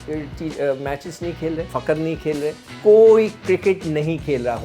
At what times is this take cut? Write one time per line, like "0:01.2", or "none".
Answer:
0:01.7
0:02.7